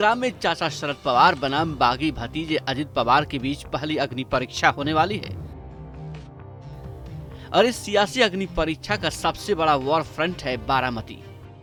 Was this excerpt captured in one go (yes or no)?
yes